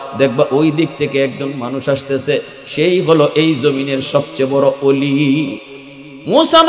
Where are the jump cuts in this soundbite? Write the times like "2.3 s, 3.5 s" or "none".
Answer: 5.6 s